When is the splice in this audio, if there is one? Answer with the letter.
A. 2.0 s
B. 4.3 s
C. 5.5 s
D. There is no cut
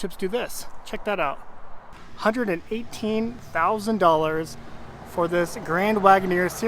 A